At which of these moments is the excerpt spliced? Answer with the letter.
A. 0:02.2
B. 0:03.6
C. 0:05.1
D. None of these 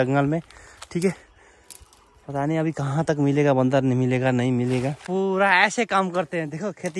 C